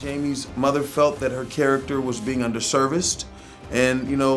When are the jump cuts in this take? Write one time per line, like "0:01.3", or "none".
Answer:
none